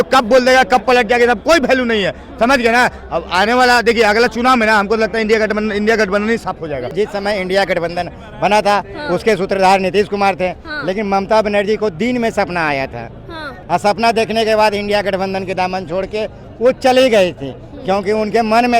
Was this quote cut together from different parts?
yes; 2 cuts; at 6.9 s, 13.5 s

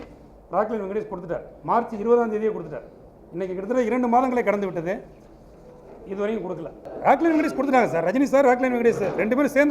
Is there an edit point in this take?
no; 0 cuts

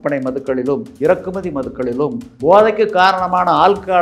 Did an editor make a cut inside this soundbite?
yes; 2 cuts; at 0.9 s, 2.3 s

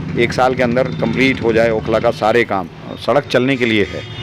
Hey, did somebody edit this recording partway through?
yes; 1 cut; at 2.8 s

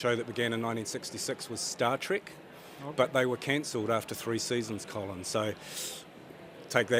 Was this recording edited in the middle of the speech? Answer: no; 0 cuts

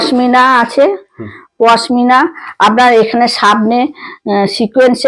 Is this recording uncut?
yes; 0 cuts

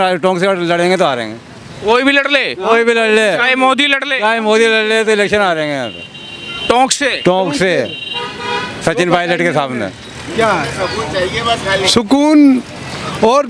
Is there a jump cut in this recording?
no; 0 cuts

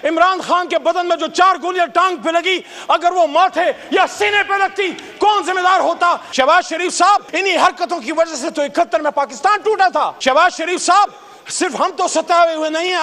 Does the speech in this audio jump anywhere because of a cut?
yes; 3 cuts; at 6.2 s, 7.3 s, 10.1 s

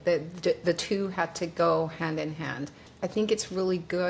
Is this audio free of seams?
no; 1 cut; at 2.9 s

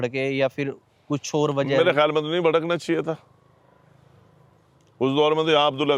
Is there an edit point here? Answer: no; 0 cuts

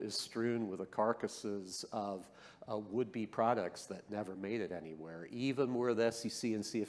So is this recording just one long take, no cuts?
yes; 0 cuts

